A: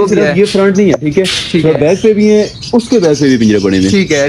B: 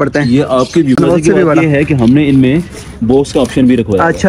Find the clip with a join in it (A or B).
B